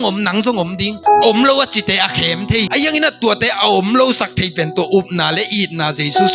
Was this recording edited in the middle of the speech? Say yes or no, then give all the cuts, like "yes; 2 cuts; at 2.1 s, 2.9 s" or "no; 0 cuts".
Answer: yes; 2 cuts; at 0.9 s, 2.7 s